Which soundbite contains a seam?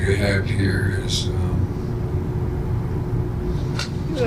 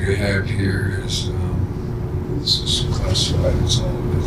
second; 1 cut; at 2.3 s

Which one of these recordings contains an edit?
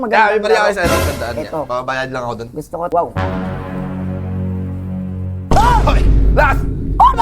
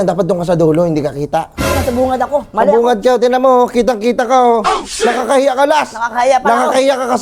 first; 1 cut; at 2.9 s

